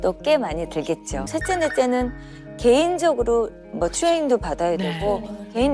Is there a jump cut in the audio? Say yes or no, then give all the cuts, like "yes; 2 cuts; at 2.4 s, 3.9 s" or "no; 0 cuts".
yes; 1 cut; at 1.3 s